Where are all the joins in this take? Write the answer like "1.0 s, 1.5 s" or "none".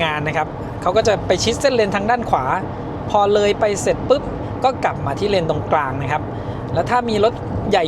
none